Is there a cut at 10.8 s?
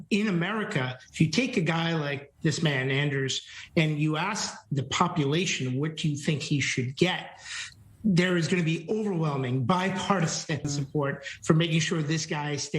yes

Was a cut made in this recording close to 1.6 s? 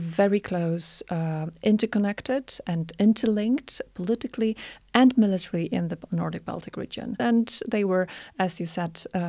no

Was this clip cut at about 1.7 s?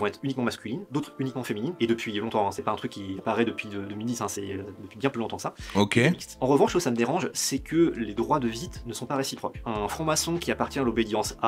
no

